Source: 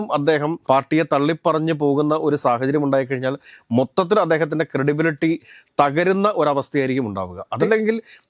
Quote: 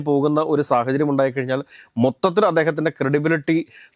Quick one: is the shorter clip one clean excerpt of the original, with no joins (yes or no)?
yes